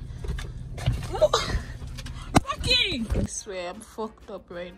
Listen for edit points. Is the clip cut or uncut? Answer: cut